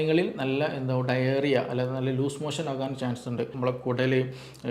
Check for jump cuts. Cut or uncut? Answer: cut